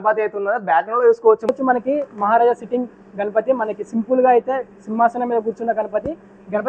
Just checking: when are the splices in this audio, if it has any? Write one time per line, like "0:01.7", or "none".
0:01.5